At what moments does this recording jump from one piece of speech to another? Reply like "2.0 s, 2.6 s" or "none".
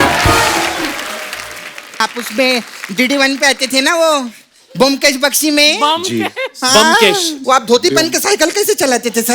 2.0 s